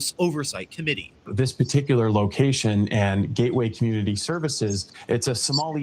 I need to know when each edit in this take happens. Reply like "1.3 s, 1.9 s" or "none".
1.3 s, 4.9 s